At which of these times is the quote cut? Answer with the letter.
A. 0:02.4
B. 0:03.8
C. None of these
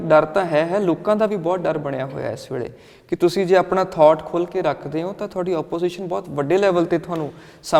C